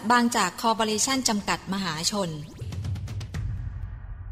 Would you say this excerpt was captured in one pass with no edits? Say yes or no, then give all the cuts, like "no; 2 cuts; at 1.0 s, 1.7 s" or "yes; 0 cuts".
no; 1 cut; at 2.6 s